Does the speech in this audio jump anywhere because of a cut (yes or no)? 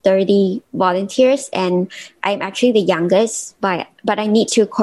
no